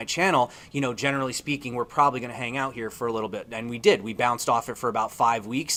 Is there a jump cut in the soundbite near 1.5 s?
no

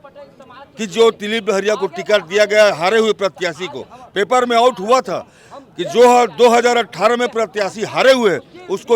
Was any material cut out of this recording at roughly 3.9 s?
no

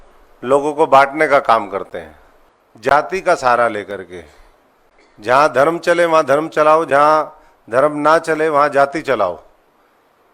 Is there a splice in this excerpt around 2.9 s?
yes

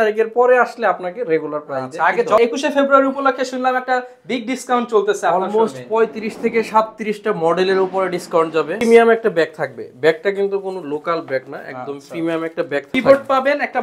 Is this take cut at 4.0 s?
no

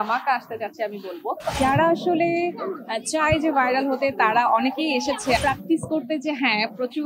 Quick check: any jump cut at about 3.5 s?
no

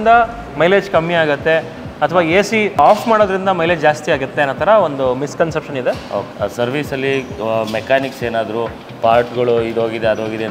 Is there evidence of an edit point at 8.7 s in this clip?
no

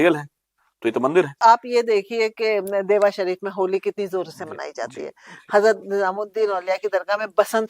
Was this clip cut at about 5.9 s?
no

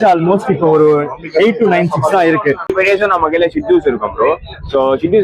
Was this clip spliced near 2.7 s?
yes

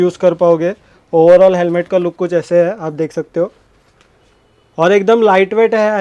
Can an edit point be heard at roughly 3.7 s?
no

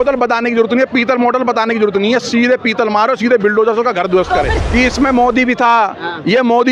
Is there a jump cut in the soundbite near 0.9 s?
no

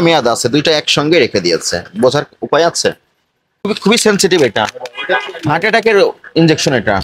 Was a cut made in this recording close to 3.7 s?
yes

